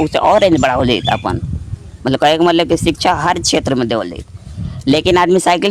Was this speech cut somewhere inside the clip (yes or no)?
no